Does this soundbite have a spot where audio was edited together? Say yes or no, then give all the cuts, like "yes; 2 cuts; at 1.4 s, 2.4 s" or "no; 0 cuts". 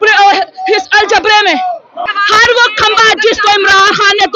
yes; 1 cut; at 2.0 s